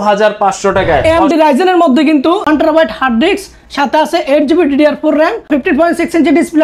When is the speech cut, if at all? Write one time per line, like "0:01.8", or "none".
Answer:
0:01.0
0:02.4
0:05.5

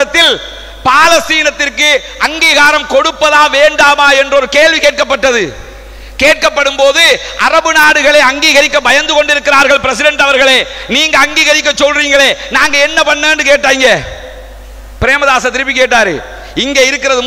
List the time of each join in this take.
none

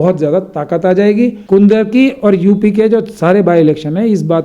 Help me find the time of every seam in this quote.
0:01.4

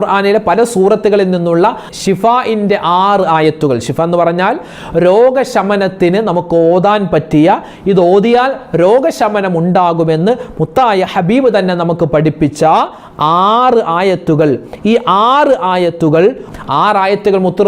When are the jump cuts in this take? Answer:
0:16.4

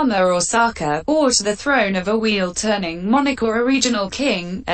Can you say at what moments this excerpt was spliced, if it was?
none

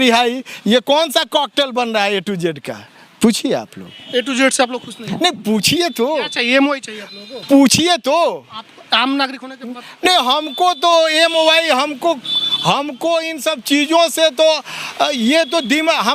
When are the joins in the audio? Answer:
none

